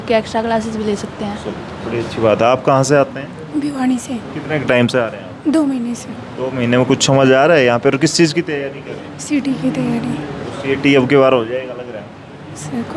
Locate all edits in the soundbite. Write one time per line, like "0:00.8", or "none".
none